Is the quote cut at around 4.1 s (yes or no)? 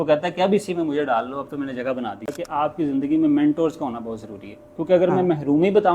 no